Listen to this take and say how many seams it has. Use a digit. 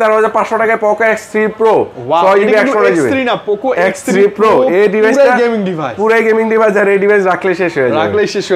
0